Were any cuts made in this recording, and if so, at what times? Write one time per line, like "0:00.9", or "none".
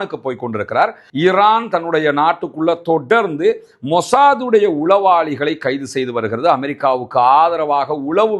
0:01.0